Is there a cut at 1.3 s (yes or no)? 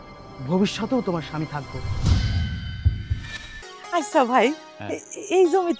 no